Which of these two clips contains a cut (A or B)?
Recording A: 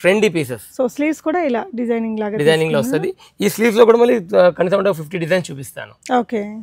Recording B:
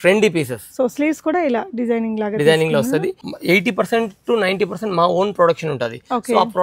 B